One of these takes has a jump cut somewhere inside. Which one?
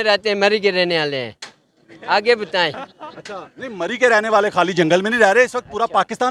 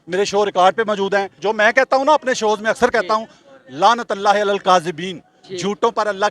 second; 1 cut; at 1.4 s

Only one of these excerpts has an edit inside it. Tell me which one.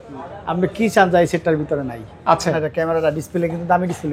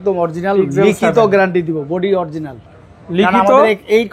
first; 1 cut; at 2.6 s

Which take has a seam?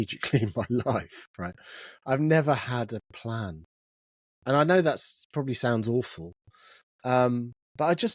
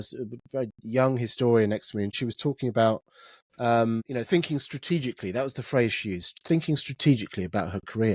second; 2 cuts; at 2.1 s, 4.1 s

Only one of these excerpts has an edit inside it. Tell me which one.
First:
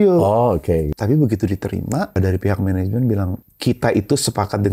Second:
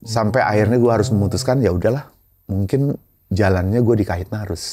first; 3 cuts; at 0.9 s, 2.1 s, 3.3 s

